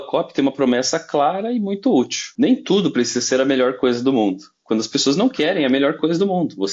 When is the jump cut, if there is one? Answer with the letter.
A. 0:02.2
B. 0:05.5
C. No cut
A